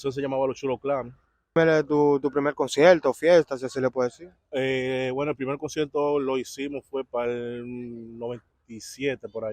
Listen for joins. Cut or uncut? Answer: cut